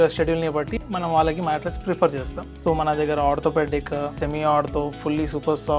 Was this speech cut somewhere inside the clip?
yes; 2 cuts; at 2.4 s, 4.2 s

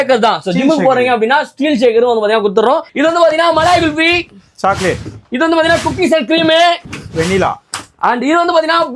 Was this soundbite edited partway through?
yes; 1 cut; at 2.9 s

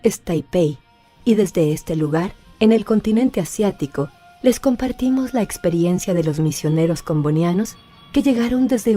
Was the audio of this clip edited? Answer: yes; 1 cut; at 7.4 s

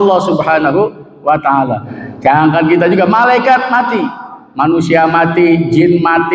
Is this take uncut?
no; 1 cut; at 1.9 s

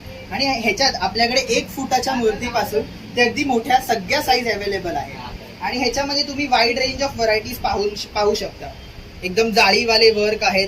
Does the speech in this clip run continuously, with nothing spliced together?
yes; 0 cuts

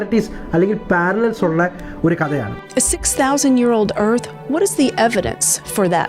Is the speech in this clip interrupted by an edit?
yes; 1 cut; at 2.6 s

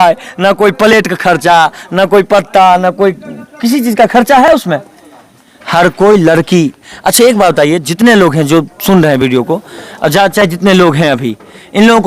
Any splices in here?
no; 0 cuts

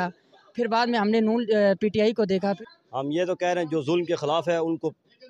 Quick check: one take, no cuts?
no; 1 cut; at 2.4 s

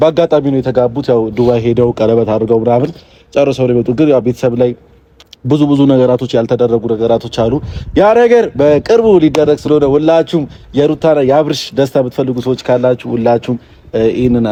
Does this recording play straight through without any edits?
yes; 0 cuts

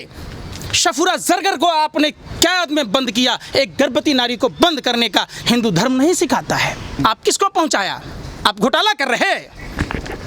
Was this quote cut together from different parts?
yes; 1 cut; at 7.0 s

